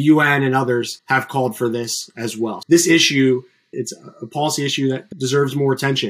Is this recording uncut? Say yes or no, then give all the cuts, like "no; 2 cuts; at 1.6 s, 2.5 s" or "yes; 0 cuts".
no; 4 cuts; at 1.0 s, 2.6 s, 3.7 s, 5.1 s